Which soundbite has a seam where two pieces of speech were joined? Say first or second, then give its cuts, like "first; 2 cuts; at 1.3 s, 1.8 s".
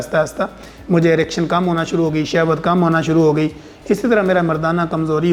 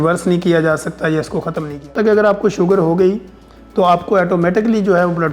second; 1 cut; at 1.9 s